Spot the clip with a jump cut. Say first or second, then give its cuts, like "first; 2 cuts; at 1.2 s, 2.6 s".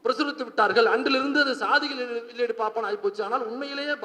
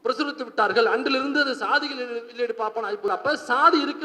second; 1 cut; at 3.1 s